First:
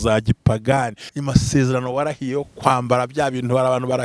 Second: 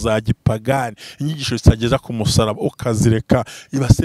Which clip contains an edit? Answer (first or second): first